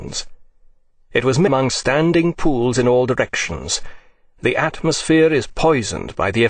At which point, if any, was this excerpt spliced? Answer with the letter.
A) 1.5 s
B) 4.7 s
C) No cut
C